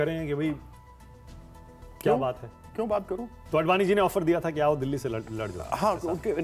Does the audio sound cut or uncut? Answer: cut